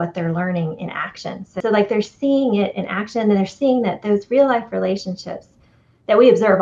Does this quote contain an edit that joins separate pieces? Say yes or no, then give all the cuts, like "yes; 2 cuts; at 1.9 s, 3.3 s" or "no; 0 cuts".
yes; 1 cut; at 1.6 s